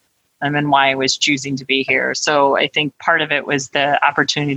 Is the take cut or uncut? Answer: cut